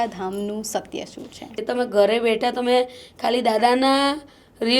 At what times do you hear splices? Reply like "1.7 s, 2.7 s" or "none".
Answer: 1.5 s